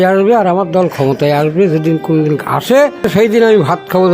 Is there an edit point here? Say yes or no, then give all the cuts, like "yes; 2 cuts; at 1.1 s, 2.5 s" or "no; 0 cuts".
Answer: yes; 1 cut; at 3.1 s